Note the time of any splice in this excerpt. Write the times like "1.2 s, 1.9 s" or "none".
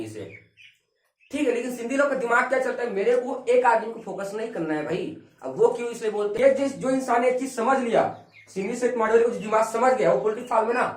6.3 s